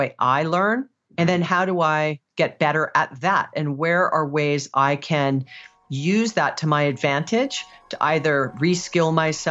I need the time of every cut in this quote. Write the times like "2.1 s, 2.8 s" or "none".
1.0 s, 2.2 s

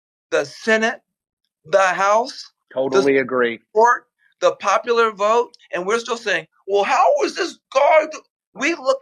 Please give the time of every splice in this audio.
5.6 s

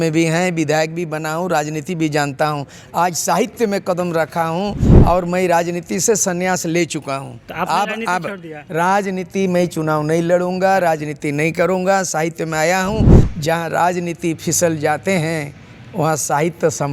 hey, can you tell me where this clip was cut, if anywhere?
13.2 s

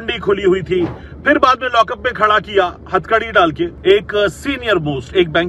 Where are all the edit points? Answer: 3.8 s

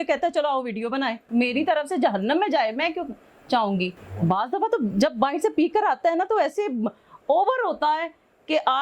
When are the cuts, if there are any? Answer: 1.2 s, 4.0 s

